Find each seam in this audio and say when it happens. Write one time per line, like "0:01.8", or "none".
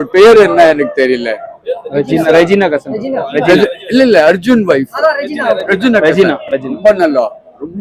none